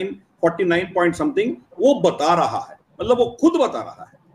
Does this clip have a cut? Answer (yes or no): no